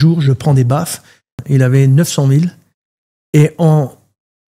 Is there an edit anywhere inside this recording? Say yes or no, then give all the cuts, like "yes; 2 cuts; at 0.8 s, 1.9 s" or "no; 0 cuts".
yes; 1 cut; at 1.4 s